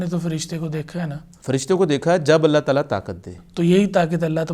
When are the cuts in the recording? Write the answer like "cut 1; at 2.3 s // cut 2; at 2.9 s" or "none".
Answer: cut 1; at 1.3 s